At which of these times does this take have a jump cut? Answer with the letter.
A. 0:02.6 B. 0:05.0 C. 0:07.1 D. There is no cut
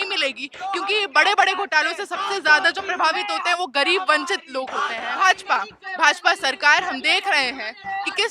B